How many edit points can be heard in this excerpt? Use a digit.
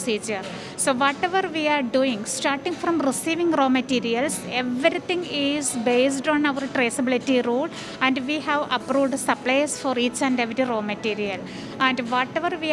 0